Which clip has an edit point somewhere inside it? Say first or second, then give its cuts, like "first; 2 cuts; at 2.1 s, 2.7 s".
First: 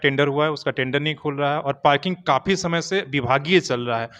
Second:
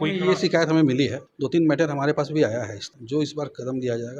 second; 2 cuts; at 1.2 s, 2.9 s